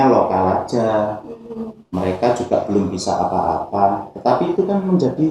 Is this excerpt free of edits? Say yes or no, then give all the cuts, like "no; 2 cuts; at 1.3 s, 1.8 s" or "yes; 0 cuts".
yes; 0 cuts